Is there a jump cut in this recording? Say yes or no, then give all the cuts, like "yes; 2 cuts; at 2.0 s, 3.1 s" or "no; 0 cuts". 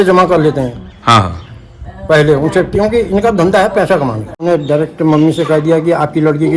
yes; 1 cut; at 4.4 s